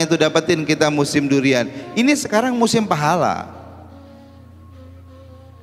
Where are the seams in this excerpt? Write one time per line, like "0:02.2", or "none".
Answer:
none